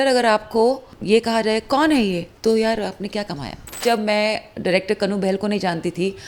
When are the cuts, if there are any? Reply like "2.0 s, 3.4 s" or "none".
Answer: 0.9 s, 2.3 s, 3.8 s

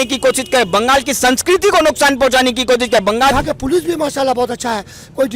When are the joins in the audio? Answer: 3.3 s

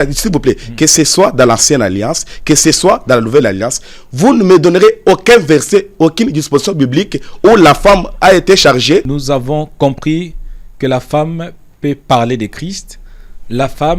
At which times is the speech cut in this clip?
9.1 s

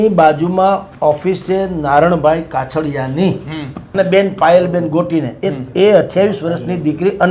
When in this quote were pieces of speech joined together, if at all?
3.8 s

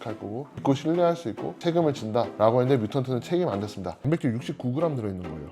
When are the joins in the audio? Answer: 1.5 s, 3.9 s

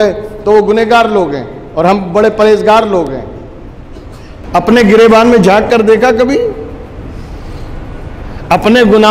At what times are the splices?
4.4 s

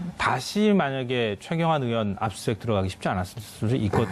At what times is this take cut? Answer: none

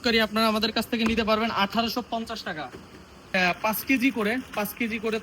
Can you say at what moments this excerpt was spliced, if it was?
3.3 s

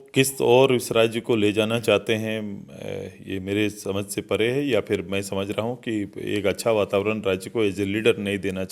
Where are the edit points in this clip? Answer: none

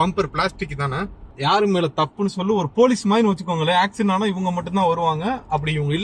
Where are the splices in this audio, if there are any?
1.3 s

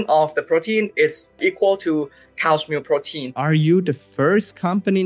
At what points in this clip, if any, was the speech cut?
1.4 s, 3.4 s

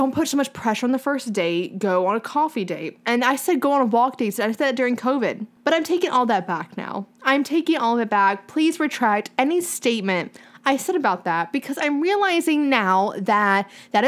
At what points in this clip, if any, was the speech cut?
5.5 s

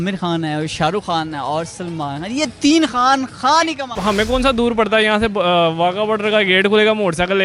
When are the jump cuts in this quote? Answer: 3.9 s

